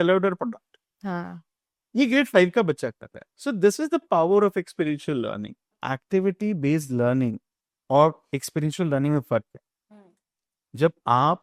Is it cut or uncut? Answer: uncut